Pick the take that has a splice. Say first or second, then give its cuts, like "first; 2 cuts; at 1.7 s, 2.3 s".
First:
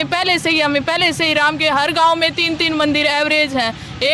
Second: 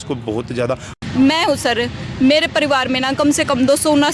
second; 1 cut; at 0.9 s